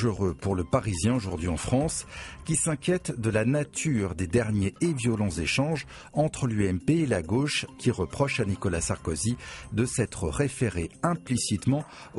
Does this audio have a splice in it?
yes; 1 cut; at 10.0 s

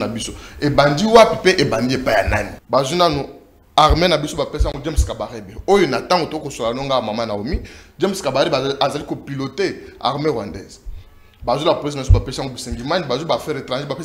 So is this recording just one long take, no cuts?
no; 1 cut; at 2.5 s

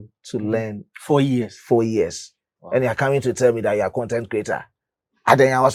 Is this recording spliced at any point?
no; 0 cuts

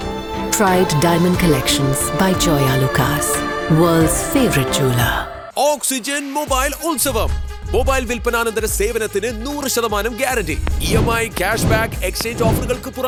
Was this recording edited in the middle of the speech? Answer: no; 0 cuts

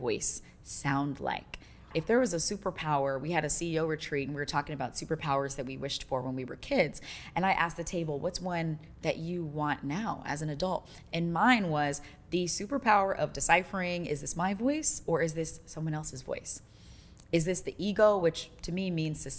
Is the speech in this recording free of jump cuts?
yes; 0 cuts

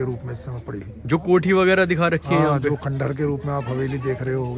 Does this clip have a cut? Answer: no; 0 cuts

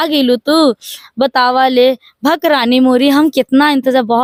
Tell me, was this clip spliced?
no; 0 cuts

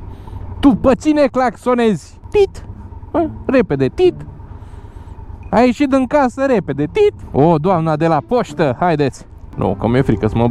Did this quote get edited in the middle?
yes; 1 cut; at 9.5 s

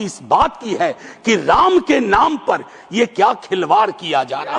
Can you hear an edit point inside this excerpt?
no; 0 cuts

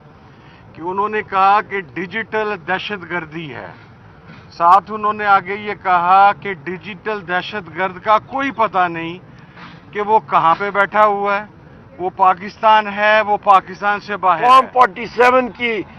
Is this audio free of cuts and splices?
no; 1 cut; at 14.4 s

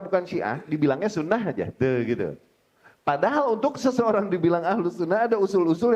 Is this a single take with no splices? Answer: yes; 0 cuts

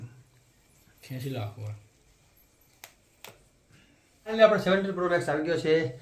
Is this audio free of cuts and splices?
no; 1 cut; at 4.4 s

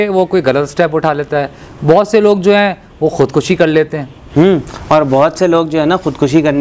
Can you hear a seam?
no; 0 cuts

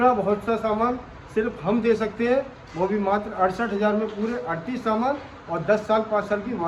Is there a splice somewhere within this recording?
no; 0 cuts

